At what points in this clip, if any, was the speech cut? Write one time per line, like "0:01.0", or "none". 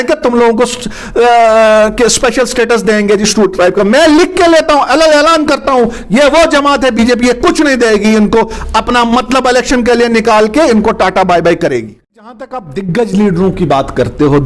0:12.4